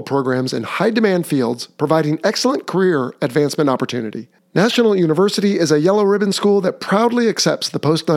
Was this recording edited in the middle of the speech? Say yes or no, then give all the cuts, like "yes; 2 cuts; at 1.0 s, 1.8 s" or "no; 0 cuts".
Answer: no; 0 cuts